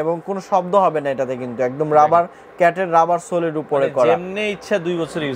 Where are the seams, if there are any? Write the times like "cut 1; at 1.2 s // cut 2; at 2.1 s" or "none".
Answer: none